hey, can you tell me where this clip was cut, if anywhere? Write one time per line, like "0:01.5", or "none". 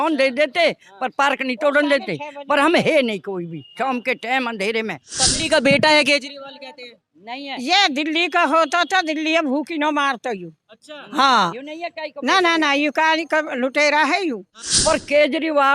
0:05.1
0:14.6